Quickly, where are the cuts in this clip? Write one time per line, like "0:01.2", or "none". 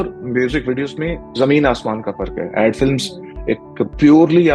0:01.2